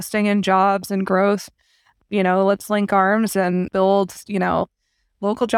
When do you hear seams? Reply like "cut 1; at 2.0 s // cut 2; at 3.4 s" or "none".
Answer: none